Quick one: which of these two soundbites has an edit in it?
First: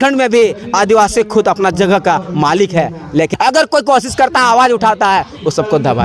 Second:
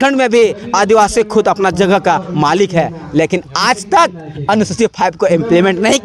first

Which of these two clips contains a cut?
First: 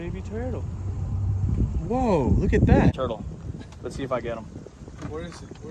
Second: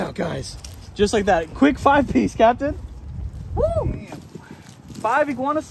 first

